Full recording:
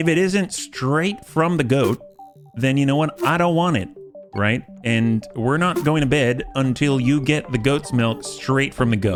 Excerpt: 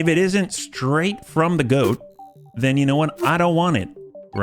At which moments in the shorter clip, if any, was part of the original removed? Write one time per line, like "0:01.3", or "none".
none